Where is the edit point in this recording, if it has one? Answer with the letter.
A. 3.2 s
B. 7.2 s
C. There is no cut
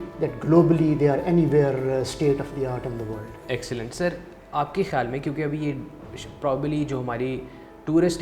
C